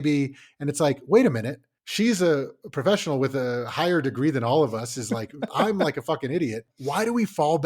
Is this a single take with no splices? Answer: no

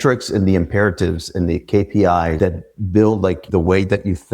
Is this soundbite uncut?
no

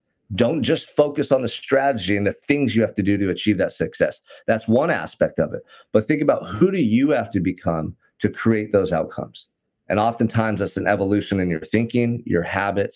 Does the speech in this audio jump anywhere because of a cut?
no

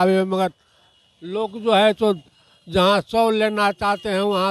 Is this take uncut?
yes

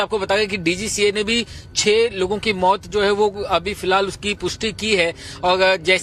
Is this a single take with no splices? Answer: yes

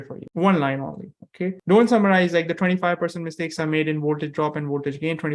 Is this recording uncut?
yes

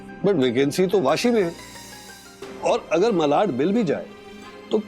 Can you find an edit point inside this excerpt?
no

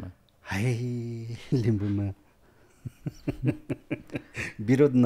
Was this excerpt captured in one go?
yes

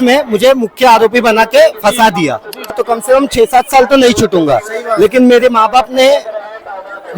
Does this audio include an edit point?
yes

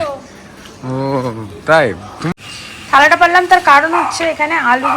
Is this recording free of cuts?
no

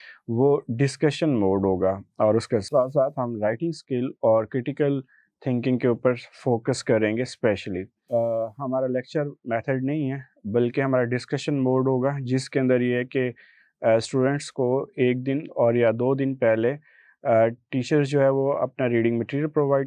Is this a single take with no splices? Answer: no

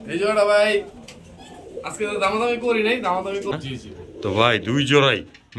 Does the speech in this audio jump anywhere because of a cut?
yes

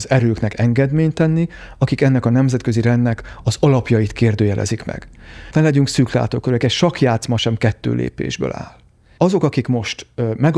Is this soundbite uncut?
yes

